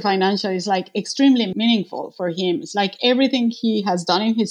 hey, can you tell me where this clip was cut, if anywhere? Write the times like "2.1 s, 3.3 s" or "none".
1.5 s